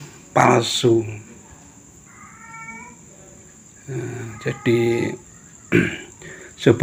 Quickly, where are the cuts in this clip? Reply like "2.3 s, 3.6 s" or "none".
none